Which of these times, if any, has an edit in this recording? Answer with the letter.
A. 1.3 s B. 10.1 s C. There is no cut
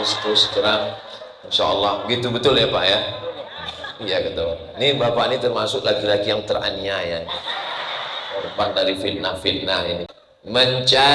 B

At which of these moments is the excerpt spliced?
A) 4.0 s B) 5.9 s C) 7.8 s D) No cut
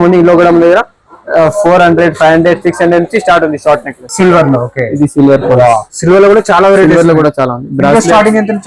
A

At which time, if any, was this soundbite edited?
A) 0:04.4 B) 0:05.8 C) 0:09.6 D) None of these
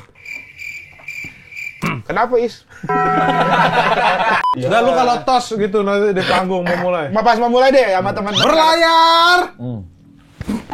A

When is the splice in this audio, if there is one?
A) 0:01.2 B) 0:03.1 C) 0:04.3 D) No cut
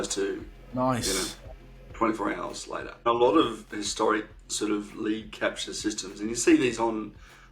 B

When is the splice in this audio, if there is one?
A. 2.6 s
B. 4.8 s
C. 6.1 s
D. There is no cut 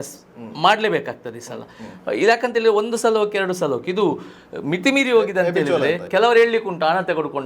C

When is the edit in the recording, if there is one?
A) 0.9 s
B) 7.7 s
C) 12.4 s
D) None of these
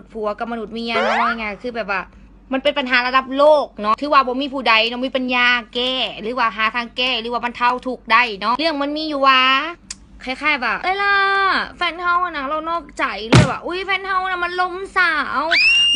D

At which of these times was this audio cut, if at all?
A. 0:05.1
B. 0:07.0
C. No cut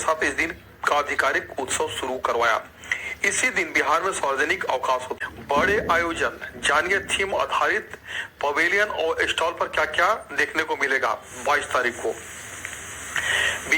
A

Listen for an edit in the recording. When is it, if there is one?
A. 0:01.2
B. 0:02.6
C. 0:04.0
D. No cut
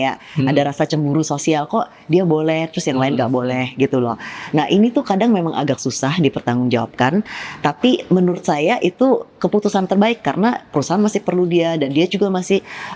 D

